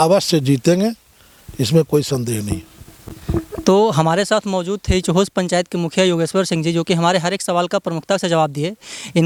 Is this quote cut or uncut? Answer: uncut